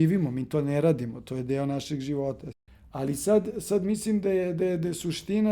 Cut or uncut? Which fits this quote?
cut